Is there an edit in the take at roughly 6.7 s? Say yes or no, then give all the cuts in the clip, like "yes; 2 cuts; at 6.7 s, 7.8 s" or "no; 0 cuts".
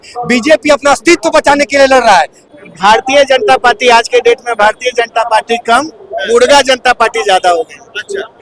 no; 1 cut; at 2.4 s